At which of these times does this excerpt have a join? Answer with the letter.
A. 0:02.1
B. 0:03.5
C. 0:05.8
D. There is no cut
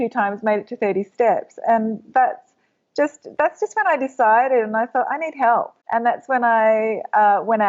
C